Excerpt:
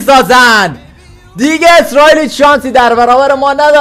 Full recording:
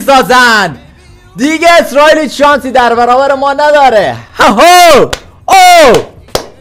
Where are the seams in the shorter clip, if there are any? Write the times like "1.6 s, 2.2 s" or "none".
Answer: none